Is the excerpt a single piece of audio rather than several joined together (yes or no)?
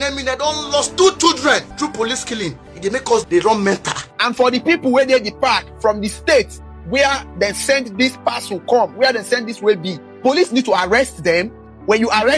no